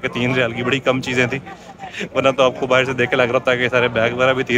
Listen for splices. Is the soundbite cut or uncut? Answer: uncut